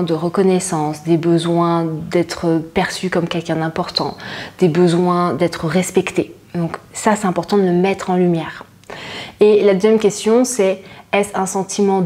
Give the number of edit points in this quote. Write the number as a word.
zero